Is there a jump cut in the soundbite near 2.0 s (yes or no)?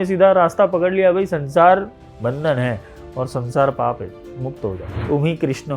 yes